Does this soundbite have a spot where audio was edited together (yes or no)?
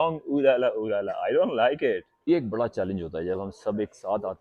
yes